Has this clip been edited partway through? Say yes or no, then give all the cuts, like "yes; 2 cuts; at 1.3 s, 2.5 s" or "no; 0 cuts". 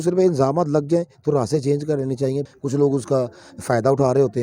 yes; 1 cut; at 2.4 s